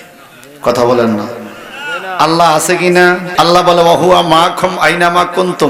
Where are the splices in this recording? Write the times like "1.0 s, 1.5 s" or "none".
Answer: 3.3 s